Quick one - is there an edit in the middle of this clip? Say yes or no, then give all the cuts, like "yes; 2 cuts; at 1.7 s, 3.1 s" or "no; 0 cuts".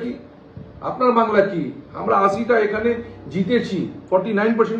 no; 0 cuts